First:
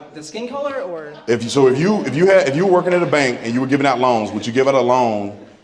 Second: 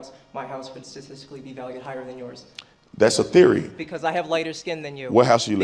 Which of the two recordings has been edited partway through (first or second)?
first